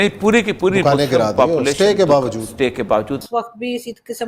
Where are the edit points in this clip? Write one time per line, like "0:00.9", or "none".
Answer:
0:03.2